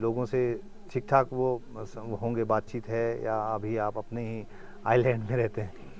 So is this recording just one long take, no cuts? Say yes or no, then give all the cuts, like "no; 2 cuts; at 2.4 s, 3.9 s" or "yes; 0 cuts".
yes; 0 cuts